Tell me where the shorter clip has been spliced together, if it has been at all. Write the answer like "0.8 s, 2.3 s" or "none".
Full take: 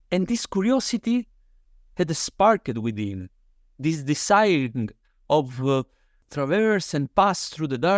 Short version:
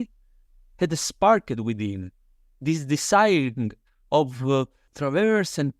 4.8 s